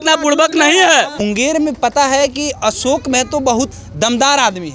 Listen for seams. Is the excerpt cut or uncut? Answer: cut